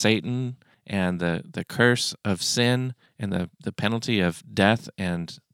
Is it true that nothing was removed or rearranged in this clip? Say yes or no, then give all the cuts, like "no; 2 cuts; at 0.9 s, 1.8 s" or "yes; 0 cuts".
yes; 0 cuts